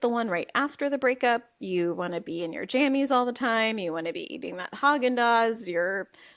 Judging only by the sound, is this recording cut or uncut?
uncut